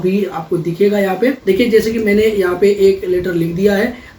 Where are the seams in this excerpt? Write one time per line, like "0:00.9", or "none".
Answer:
0:01.4